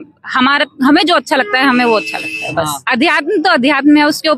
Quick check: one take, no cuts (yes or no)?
no